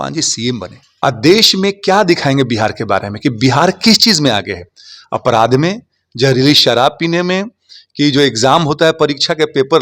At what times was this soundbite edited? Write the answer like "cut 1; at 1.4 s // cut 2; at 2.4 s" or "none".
cut 1; at 1.0 s

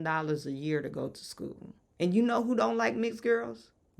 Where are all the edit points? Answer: cut 1; at 1.8 s

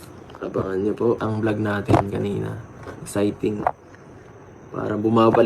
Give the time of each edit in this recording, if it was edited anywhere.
cut 1; at 1.3 s

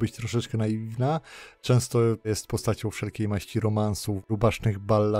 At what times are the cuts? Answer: cut 1; at 2.3 s // cut 2; at 4.1 s

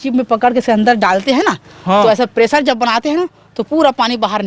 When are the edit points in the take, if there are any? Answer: none

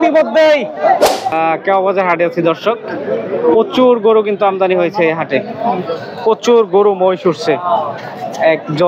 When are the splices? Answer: cut 1; at 1.3 s

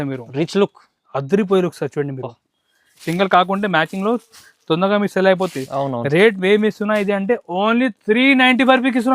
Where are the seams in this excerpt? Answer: cut 1; at 3.0 s

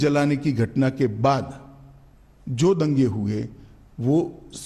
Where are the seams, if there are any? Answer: none

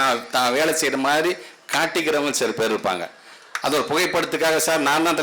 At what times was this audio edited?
none

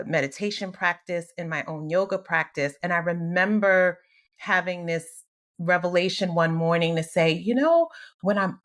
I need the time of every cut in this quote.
none

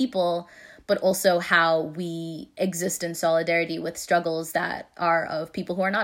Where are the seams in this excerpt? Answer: none

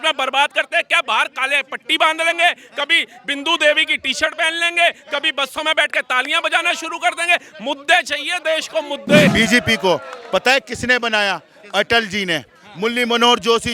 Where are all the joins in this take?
cut 1; at 9.3 s

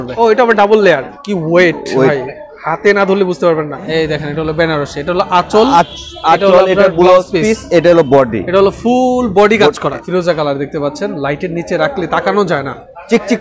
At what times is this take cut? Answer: cut 1; at 1.1 s // cut 2; at 3.9 s // cut 3; at 9.9 s

